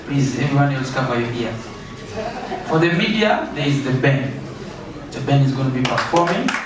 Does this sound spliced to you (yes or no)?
no